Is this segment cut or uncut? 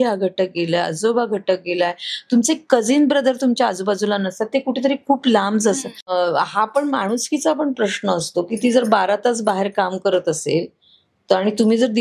cut